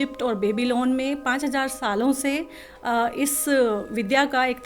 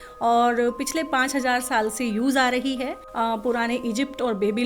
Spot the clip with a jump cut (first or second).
second